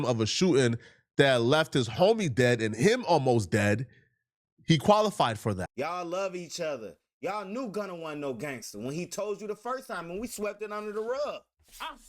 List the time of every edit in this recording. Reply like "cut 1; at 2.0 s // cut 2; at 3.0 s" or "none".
cut 1; at 5.7 s